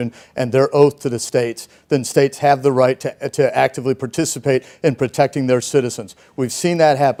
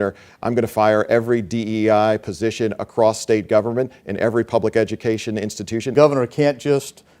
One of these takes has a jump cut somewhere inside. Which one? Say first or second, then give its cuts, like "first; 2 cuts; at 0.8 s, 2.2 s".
second; 1 cut; at 5.9 s